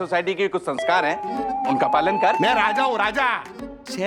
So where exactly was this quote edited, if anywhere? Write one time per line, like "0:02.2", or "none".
0:02.3

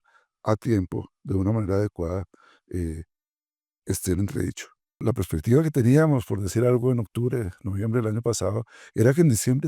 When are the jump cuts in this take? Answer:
0:05.0

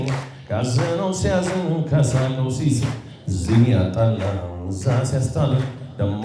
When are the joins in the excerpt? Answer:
none

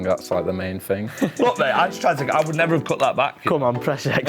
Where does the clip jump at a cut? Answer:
0:01.1

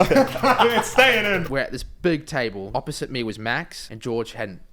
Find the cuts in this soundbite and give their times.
0:01.4
0:02.7
0:03.8

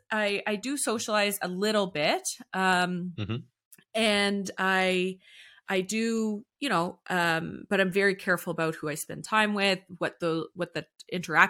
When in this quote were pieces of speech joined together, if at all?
none

